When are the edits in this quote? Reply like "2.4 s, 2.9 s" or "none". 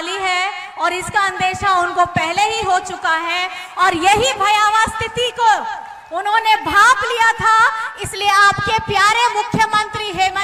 none